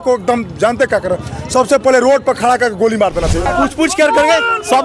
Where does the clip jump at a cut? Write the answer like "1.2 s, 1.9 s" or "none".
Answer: 3.5 s